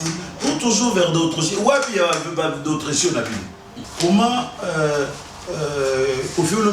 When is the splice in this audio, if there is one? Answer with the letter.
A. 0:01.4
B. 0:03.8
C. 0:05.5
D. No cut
B